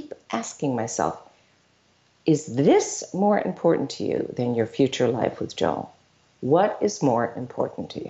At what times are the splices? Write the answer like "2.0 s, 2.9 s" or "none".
none